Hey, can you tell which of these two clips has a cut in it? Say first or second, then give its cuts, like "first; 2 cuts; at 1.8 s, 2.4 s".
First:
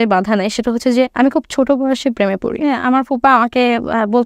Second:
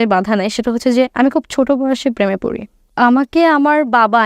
first; 1 cut; at 2.7 s